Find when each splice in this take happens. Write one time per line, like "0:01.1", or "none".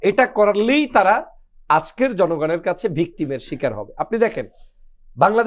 none